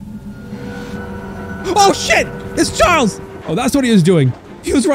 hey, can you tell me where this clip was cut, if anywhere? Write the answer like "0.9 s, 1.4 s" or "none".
3.3 s